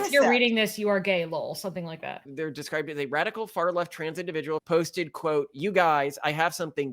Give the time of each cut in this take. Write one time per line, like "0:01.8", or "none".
0:02.3
0:04.6